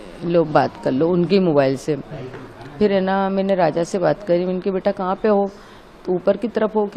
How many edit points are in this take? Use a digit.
0